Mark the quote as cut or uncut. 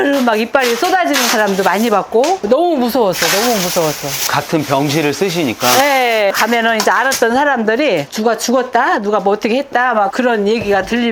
uncut